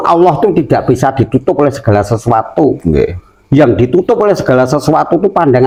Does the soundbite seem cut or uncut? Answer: uncut